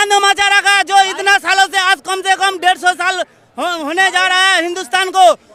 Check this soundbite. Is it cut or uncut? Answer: uncut